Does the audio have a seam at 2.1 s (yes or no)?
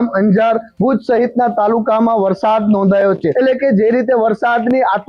no